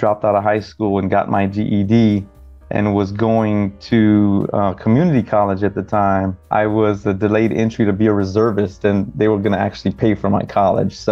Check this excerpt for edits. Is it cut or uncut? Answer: cut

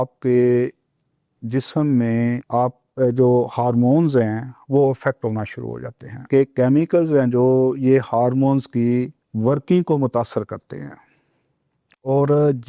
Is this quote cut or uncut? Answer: cut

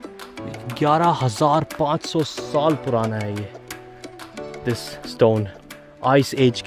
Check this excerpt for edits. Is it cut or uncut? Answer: uncut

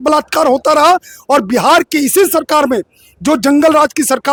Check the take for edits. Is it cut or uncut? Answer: uncut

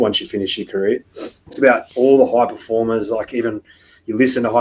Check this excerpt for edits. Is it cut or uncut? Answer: cut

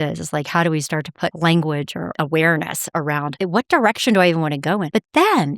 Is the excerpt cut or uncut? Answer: uncut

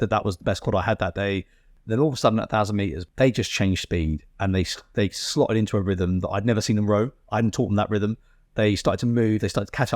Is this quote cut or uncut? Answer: cut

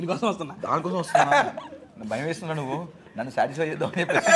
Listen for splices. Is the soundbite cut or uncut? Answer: uncut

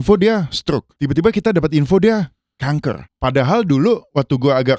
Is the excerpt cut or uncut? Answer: cut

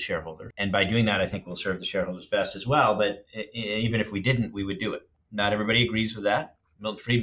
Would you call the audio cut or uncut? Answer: uncut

